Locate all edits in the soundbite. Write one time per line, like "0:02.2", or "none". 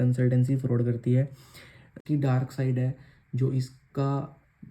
0:02.0